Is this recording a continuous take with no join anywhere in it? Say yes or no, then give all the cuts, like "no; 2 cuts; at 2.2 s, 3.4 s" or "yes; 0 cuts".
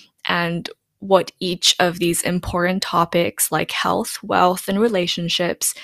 yes; 0 cuts